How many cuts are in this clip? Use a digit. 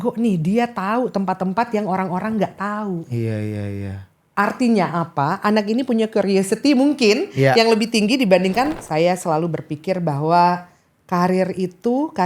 1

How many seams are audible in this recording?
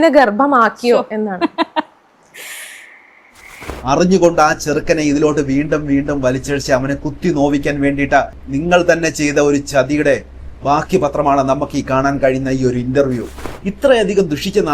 2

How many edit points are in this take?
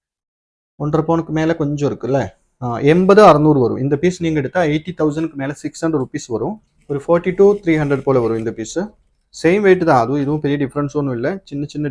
1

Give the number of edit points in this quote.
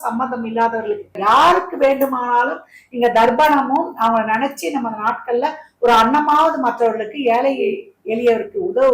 1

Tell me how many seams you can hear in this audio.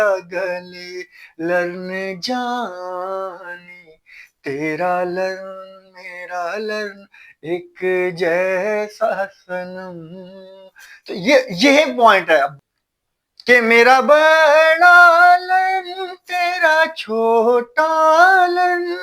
1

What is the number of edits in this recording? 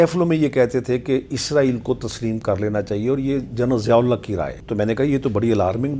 1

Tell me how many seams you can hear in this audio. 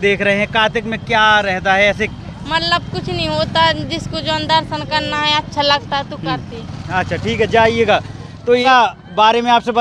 1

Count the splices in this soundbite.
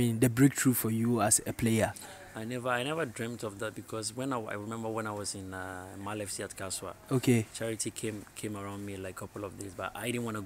0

